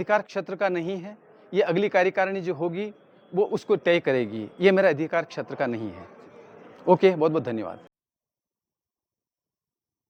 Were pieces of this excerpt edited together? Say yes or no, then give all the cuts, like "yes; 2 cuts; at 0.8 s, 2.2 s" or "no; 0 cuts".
no; 0 cuts